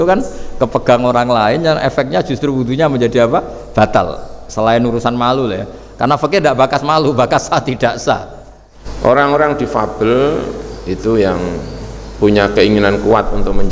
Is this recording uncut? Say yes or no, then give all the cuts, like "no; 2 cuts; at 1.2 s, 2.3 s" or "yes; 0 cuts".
no; 1 cut; at 8.4 s